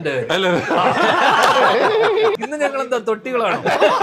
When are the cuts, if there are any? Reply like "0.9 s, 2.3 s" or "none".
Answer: 2.3 s